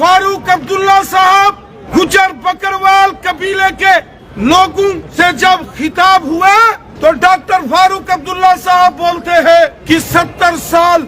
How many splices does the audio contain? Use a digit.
5